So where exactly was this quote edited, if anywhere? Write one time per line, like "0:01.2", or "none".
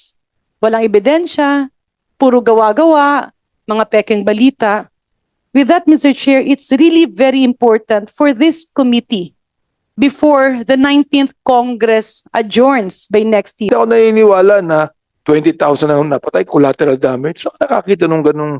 0:13.7